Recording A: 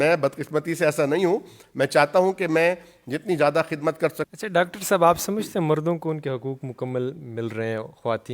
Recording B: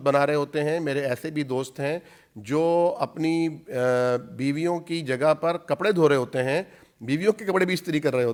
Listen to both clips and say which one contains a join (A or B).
A